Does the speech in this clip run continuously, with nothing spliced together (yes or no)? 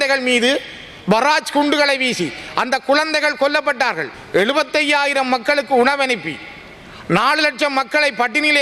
no